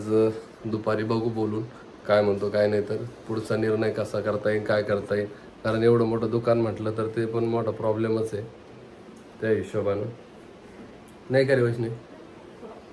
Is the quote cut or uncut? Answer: uncut